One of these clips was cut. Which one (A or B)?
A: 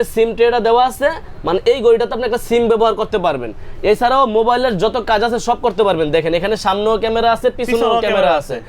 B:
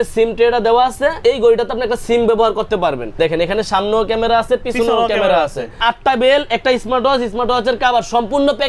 B